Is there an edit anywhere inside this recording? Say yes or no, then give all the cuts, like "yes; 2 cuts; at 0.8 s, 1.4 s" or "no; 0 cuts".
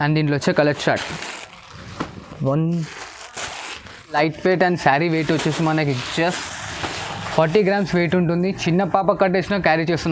yes; 1 cut; at 4.2 s